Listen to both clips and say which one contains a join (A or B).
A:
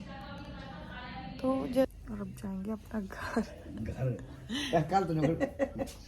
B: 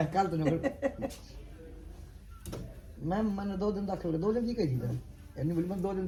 A